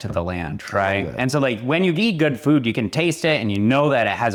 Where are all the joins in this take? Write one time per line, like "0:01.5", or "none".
none